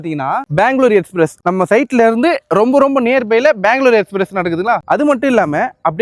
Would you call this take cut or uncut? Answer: uncut